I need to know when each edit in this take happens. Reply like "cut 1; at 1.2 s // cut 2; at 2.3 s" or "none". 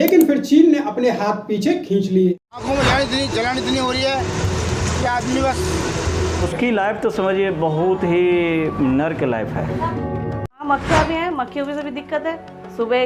cut 1; at 2.5 s // cut 2; at 6.5 s // cut 3; at 10.7 s